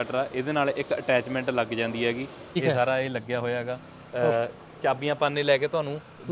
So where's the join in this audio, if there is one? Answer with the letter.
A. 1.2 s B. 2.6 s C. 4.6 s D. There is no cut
B